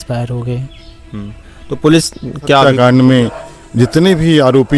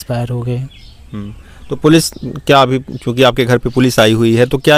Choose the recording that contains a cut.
first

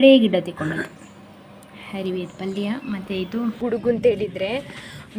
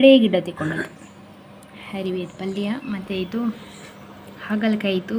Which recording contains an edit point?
first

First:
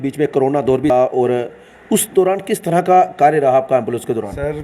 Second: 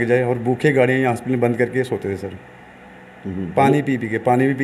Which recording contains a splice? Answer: first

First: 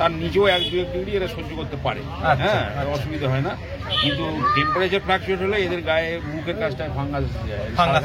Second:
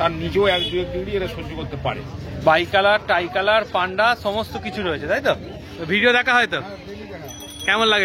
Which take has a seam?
second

